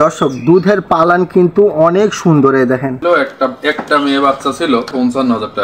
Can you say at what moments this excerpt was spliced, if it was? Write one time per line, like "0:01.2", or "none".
0:03.0
0:04.9